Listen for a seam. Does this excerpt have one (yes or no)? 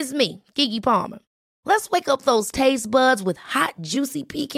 no